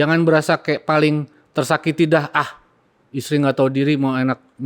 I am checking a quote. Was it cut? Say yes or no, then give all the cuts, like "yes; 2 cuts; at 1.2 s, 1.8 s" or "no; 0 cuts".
no; 0 cuts